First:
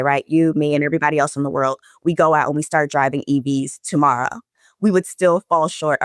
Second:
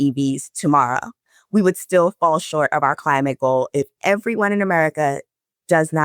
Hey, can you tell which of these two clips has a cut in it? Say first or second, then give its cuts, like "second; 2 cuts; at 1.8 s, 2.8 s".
second; 1 cut; at 3.9 s